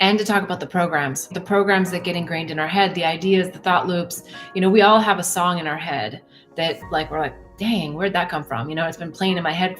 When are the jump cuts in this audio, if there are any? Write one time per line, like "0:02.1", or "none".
0:01.3